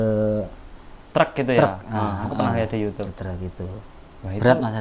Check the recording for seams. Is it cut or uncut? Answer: uncut